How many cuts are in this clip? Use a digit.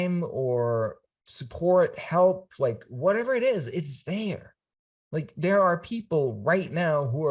0